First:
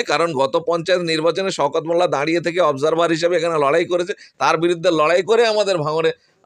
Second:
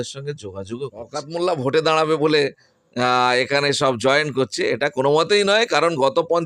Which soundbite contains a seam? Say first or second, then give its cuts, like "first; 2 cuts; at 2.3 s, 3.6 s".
second; 1 cut; at 1.2 s